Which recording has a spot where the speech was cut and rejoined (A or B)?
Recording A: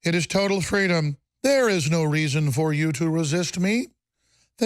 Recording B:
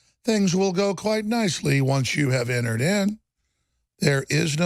A